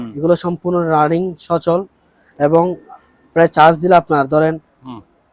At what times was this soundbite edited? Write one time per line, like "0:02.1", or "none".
none